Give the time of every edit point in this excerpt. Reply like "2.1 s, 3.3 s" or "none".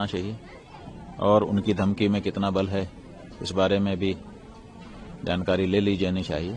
none